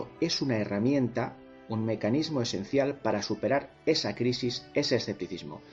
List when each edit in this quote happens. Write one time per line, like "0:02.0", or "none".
none